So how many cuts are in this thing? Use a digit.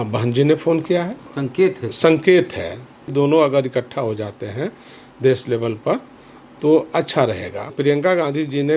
3